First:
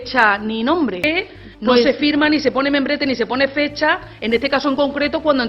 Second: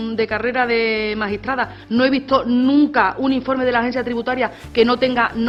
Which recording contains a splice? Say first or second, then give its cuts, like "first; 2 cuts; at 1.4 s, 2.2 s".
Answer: first; 1 cut; at 1.0 s